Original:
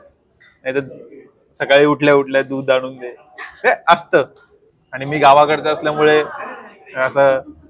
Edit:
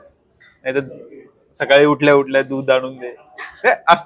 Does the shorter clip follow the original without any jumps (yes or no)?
yes